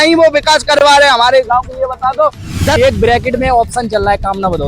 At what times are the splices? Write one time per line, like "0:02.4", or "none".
0:02.7